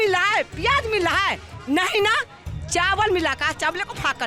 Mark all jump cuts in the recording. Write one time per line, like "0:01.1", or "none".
none

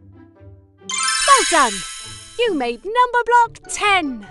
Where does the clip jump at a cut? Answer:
none

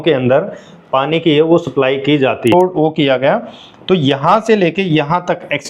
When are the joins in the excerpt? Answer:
0:02.5

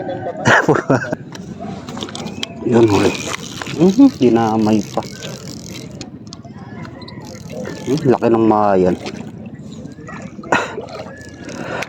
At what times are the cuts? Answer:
0:01.3

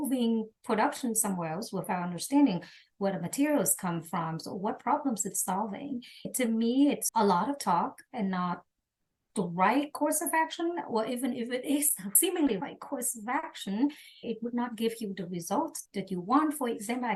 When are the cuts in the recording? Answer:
none

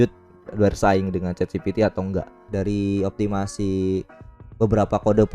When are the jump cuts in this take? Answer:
0:02.4

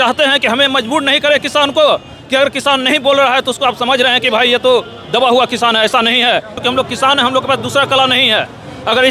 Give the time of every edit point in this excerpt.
0:06.6

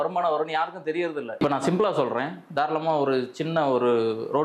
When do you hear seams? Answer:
none

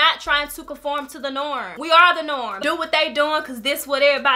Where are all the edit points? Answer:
0:02.5

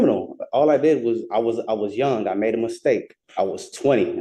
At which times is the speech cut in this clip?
0:03.2

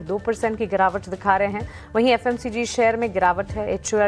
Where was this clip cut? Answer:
0:02.6

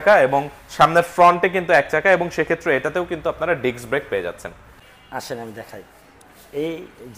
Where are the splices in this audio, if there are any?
0:04.8

